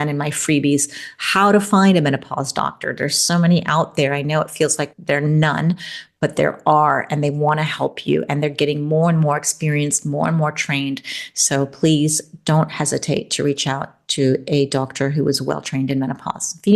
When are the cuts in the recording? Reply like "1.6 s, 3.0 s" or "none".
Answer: none